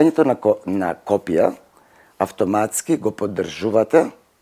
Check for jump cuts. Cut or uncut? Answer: uncut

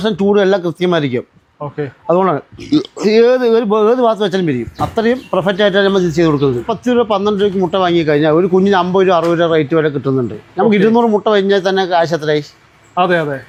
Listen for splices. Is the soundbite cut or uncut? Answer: uncut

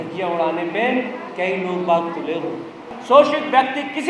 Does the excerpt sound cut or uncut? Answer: cut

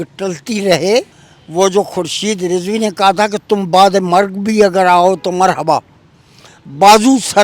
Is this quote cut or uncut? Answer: cut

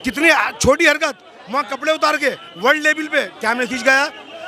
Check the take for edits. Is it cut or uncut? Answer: uncut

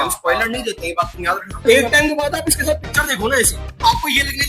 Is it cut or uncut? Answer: cut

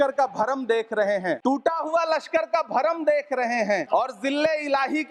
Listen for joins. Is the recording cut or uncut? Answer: cut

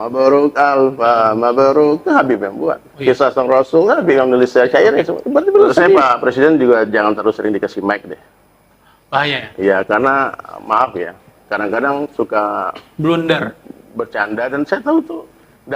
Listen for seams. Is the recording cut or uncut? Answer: cut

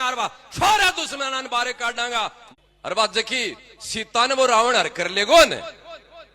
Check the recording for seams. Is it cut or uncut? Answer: cut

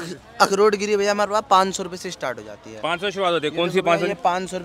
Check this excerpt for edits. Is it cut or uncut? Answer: uncut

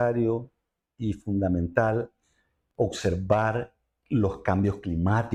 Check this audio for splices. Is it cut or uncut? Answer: uncut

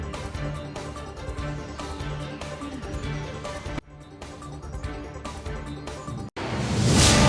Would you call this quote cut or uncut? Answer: cut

